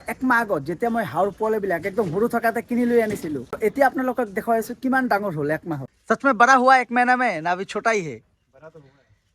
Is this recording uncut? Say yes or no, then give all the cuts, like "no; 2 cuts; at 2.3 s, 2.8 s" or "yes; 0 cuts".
no; 2 cuts; at 3.6 s, 5.8 s